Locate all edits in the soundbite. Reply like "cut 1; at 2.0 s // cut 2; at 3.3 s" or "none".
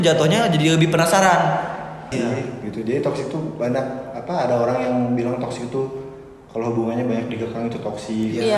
cut 1; at 2.1 s